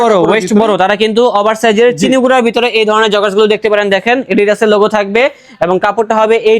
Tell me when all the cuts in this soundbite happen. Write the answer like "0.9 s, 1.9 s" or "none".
none

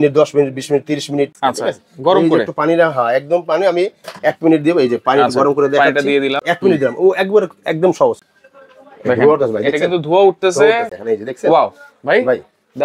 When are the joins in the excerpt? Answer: 1.4 s, 6.4 s, 8.3 s, 10.9 s

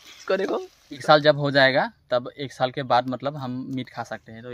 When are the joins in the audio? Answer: 1.0 s

